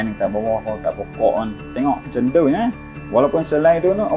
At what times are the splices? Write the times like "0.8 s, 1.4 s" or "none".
2.9 s